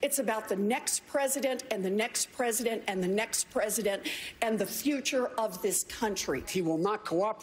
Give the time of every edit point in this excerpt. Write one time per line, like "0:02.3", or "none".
0:06.5